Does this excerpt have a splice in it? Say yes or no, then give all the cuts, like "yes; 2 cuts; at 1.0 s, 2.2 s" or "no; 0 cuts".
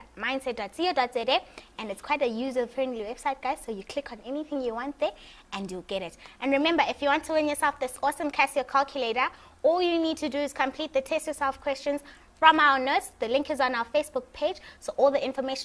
yes; 1 cut; at 12.7 s